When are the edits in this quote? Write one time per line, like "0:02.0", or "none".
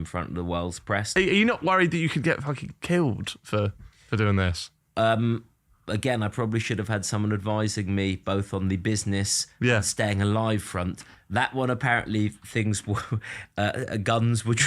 0:01.1